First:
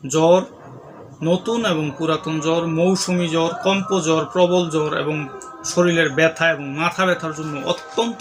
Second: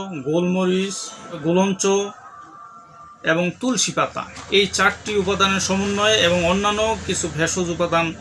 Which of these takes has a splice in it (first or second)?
second